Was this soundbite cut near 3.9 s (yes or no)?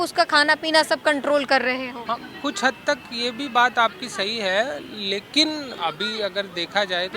no